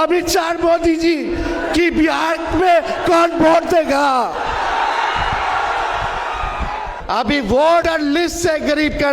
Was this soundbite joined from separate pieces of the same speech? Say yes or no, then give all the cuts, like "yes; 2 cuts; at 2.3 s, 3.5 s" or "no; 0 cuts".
yes; 2 cuts; at 6.9 s, 7.8 s